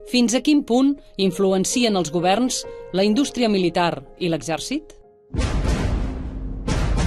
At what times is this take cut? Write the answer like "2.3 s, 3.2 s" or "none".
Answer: none